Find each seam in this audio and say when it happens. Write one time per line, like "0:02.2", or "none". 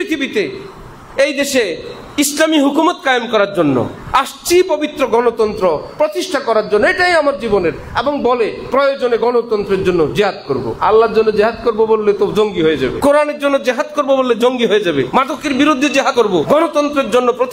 0:10.7
0:13.0
0:15.1
0:16.2

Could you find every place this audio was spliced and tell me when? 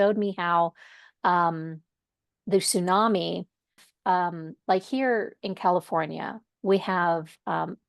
0:03.8

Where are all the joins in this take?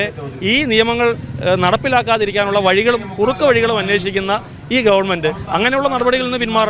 none

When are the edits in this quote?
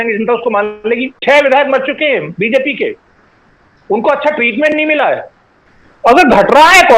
0:01.2
0:05.5

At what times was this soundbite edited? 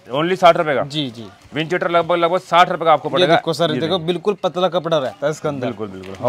none

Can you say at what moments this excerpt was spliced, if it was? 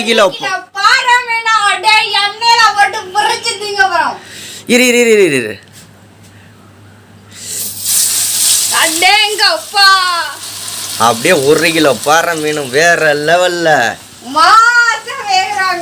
none

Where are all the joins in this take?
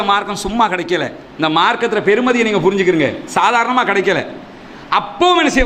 none

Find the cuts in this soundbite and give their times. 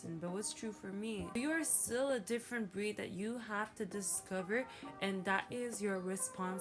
0:01.4

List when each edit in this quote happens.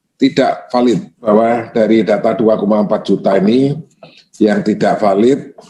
0:01.2

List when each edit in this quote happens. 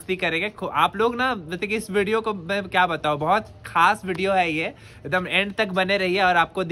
none

